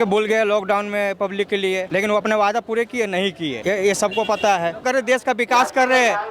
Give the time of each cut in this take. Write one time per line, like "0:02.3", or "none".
0:01.9
0:03.6
0:04.8